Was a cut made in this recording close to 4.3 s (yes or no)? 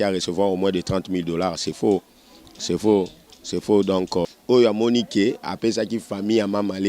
yes